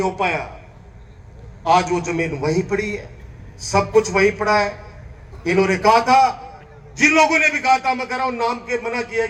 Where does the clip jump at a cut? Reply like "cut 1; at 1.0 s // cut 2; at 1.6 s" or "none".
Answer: none